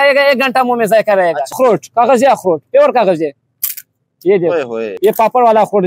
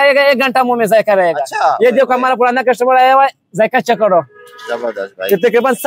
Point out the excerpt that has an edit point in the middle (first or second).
first